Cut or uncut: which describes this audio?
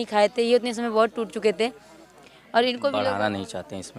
cut